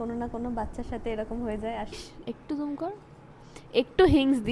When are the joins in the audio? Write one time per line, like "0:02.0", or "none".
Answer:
0:02.0